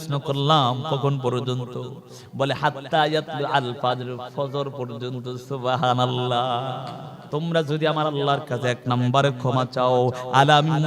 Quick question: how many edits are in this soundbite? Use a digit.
1